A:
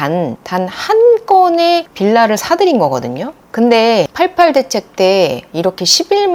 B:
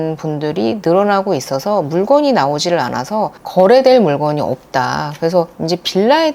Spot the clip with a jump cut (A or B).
B